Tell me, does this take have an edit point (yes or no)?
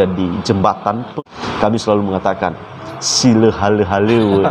yes